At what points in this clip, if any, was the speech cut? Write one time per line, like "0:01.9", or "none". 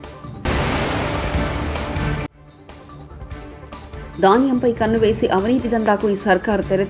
none